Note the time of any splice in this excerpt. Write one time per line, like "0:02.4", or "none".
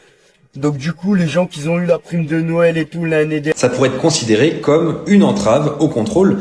0:03.5